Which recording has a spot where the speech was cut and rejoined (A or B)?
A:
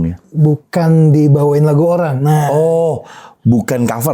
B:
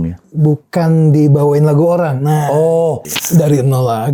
B